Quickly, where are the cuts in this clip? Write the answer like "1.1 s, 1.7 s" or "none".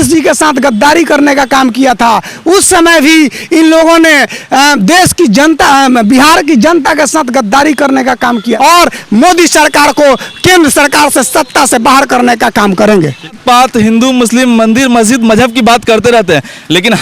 8.6 s, 13.4 s

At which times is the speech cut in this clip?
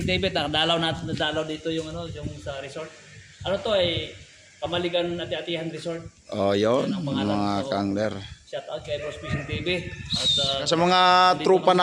10.7 s

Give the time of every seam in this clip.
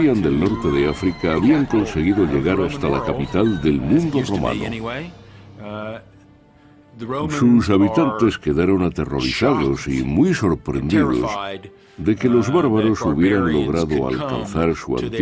5.3 s

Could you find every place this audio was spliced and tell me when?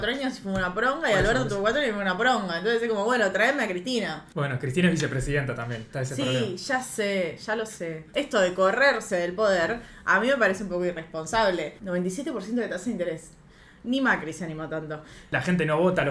4.2 s, 8.0 s, 11.8 s, 15.2 s

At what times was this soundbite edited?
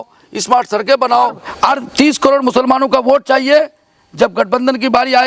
1.4 s

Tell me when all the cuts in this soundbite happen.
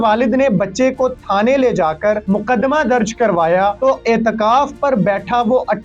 2.2 s, 3.8 s

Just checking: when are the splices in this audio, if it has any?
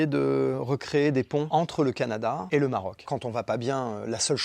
2.4 s, 3.1 s

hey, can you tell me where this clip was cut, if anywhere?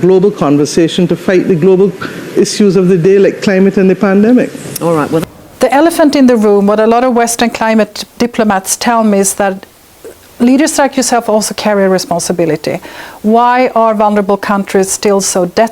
5.2 s

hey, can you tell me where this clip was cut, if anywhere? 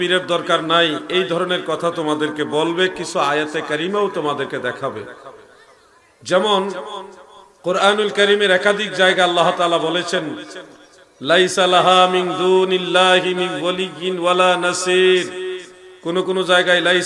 none

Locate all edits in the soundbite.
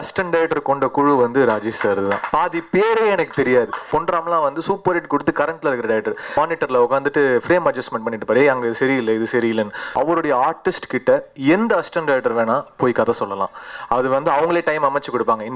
2.3 s, 3.8 s, 6.2 s, 9.8 s

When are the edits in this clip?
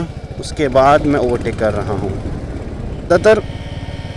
3.1 s

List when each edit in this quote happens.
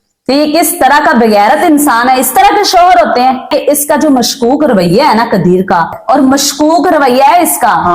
3.5 s, 6.0 s

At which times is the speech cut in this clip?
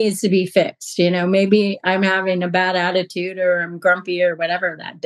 none

